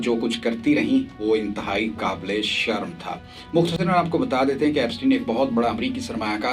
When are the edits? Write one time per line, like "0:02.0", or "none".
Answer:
none